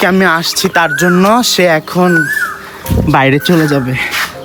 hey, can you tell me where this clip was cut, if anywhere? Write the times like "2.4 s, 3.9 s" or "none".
none